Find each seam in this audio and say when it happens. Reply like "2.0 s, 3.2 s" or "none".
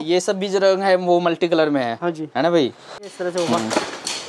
3.1 s